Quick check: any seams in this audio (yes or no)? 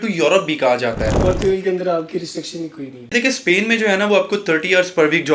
yes